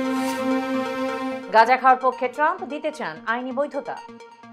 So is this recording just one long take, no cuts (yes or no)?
yes